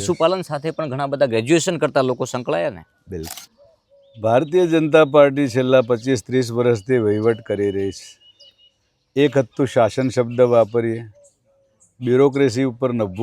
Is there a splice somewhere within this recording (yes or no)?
yes